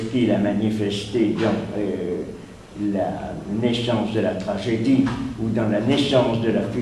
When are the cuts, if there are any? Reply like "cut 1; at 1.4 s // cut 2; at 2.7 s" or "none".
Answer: cut 1; at 5.5 s